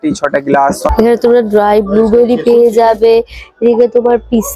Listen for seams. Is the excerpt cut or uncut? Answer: cut